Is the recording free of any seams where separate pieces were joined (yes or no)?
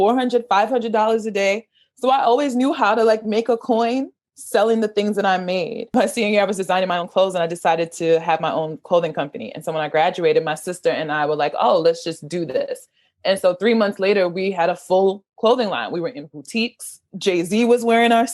no